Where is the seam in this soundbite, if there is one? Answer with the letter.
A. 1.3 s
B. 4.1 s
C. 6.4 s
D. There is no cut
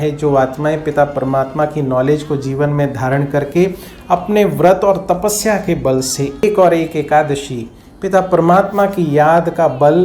C